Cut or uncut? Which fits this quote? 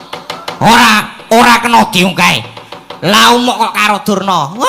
uncut